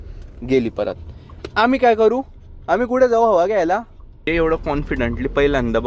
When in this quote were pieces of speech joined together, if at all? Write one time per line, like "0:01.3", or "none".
0:04.3